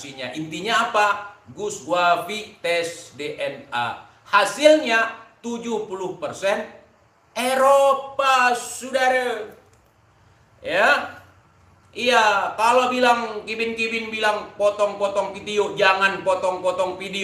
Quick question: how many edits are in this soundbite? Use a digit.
0